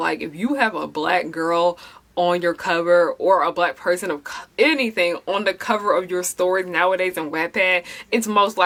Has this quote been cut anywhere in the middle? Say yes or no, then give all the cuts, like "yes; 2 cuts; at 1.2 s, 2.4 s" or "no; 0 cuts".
no; 0 cuts